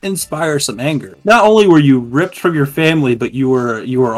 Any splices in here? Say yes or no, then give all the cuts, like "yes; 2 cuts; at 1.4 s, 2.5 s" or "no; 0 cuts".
yes; 1 cut; at 1.1 s